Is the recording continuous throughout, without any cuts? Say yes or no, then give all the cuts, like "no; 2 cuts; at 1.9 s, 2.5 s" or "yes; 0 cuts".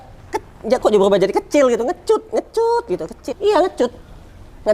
no; 1 cut; at 3.3 s